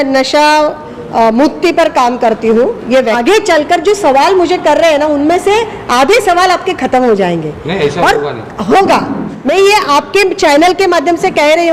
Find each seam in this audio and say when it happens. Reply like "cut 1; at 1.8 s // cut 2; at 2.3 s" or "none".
cut 1; at 3.2 s // cut 2; at 9.5 s